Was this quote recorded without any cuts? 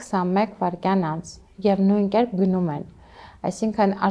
yes; 0 cuts

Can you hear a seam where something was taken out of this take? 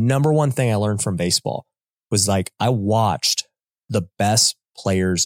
no; 0 cuts

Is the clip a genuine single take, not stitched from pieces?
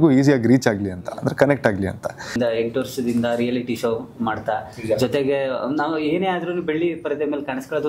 no; 1 cut; at 2.4 s

